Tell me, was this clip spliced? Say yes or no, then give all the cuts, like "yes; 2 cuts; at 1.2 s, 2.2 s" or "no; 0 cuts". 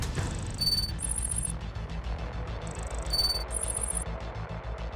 no; 0 cuts